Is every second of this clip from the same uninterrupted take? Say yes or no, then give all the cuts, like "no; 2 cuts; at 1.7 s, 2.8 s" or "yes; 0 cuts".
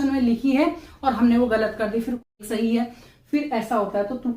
no; 1 cut; at 2.3 s